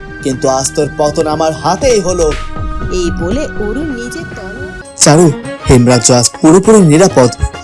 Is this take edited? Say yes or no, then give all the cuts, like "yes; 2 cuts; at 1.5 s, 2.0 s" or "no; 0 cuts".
yes; 1 cut; at 4.6 s